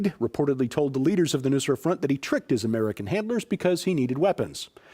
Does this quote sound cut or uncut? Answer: uncut